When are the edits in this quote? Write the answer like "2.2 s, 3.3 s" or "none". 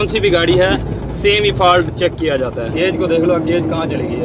2.7 s